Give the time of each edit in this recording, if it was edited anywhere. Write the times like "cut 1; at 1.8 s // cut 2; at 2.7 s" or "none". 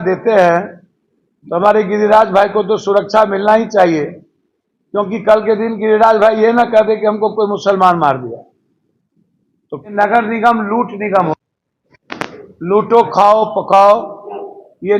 cut 1; at 9.9 s